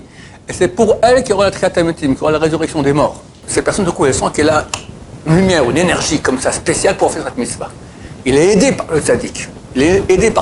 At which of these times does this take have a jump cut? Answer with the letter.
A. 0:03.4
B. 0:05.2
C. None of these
A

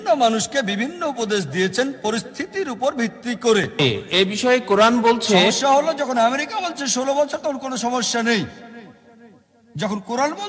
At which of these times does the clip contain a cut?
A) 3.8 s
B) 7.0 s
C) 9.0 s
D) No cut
A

